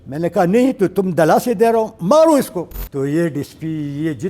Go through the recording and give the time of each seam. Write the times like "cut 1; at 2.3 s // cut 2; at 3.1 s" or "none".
cut 1; at 2.8 s